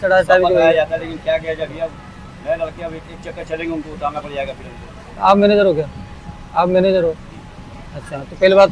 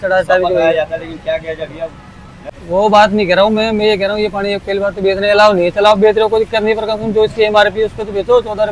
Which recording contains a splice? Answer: second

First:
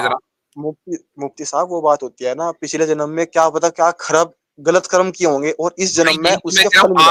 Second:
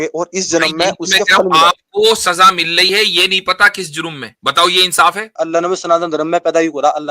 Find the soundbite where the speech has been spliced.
second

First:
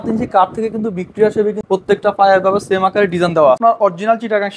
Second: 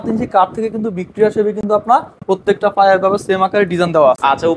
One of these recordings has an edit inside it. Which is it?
first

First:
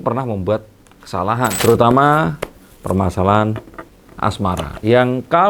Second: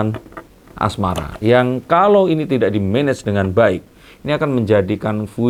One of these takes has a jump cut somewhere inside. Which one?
first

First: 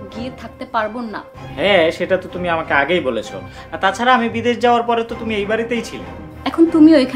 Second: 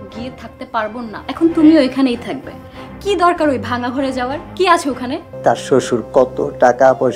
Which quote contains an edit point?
second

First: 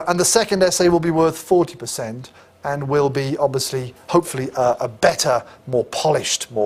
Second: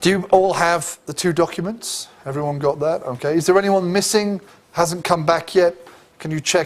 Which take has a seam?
second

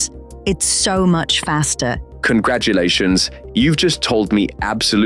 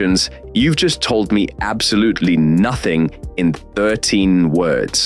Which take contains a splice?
first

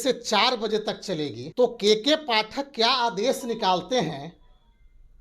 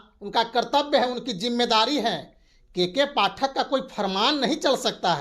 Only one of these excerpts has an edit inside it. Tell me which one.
first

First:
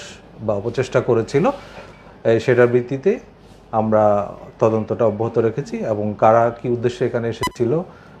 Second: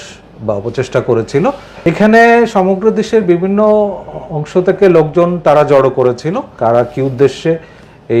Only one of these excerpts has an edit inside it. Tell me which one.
second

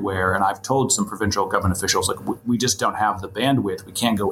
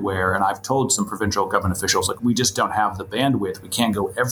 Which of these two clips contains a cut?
second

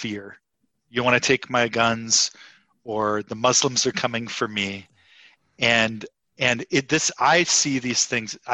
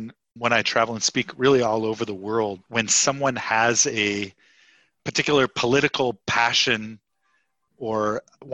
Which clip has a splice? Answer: second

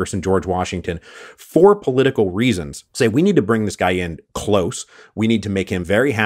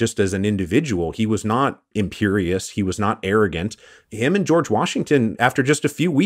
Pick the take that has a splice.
second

